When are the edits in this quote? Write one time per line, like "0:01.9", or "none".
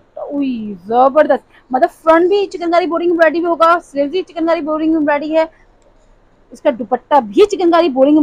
none

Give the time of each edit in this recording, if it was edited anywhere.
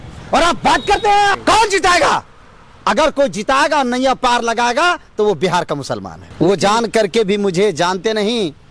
0:01.3
0:06.2

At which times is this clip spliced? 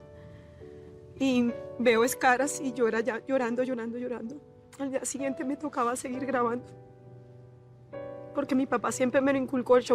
none

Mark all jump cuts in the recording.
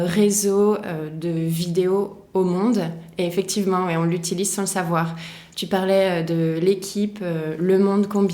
none

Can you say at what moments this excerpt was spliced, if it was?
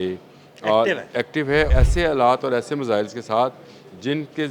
0:01.7

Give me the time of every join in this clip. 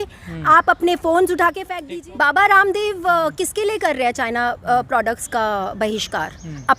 0:01.7

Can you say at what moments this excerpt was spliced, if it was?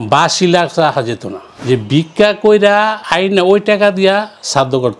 0:01.6

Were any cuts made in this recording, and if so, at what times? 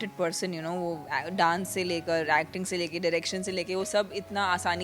none

